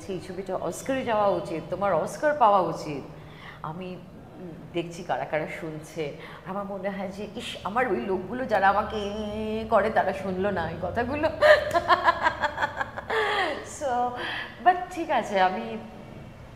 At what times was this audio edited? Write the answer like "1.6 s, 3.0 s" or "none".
none